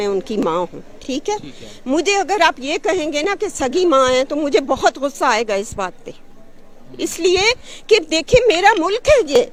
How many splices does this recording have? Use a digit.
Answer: 0